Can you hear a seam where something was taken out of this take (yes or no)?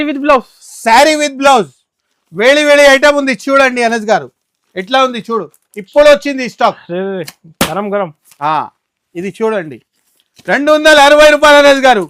no